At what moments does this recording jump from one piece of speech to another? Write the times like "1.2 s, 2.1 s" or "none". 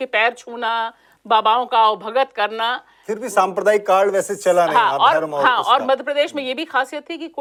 none